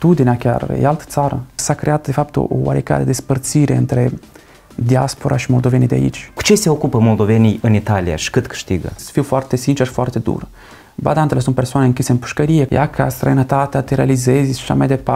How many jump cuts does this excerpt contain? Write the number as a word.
four